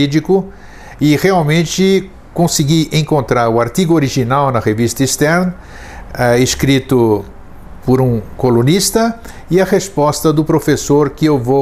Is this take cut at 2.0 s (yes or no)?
yes